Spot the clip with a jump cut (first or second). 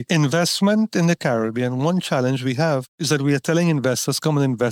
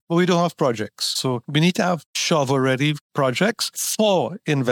second